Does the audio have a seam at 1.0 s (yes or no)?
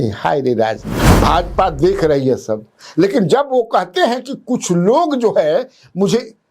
yes